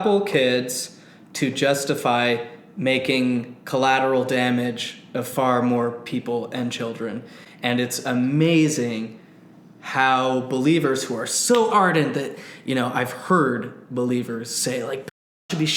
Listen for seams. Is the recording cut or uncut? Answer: uncut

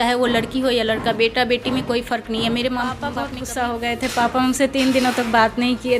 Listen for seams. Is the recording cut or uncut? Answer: cut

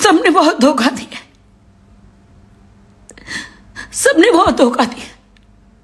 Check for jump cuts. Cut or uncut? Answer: uncut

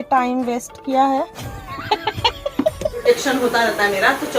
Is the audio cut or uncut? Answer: cut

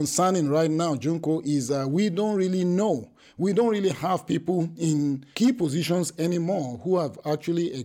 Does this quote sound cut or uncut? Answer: cut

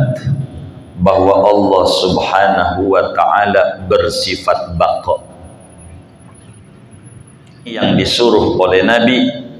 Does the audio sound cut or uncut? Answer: cut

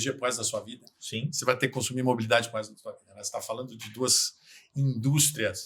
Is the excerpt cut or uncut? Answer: uncut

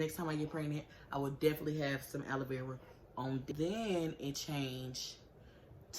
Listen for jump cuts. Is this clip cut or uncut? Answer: cut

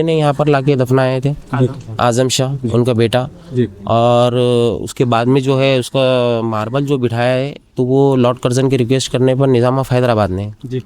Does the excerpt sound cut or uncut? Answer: uncut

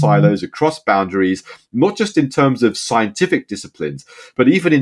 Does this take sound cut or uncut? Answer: uncut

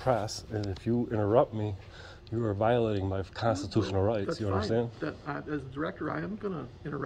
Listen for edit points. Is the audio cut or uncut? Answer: uncut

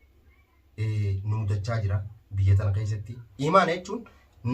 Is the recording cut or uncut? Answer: cut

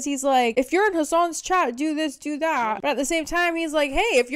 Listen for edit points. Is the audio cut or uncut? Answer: uncut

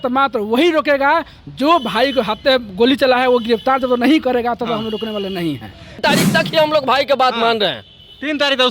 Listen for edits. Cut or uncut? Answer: cut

